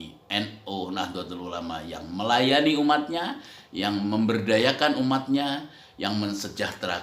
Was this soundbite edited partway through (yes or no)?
no